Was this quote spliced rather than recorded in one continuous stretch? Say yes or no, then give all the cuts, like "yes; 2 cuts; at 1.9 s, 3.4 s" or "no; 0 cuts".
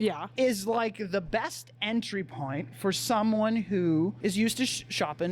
yes; 1 cut; at 4.2 s